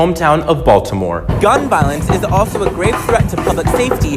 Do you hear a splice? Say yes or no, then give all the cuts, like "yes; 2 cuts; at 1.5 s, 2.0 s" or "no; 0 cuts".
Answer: yes; 1 cut; at 1.3 s